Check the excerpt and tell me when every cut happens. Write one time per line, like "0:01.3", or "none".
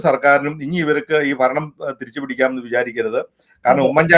none